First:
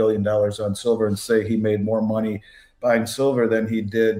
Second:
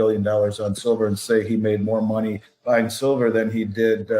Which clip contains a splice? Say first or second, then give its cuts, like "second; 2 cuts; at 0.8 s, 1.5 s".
second; 1 cut; at 2.5 s